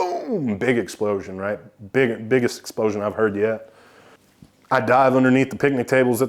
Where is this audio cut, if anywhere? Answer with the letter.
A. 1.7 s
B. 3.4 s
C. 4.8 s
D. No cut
D